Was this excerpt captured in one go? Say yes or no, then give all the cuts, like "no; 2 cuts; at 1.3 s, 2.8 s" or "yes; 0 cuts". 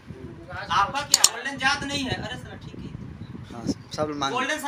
no; 1 cut; at 1.3 s